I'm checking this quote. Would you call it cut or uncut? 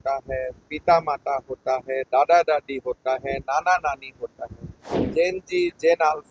cut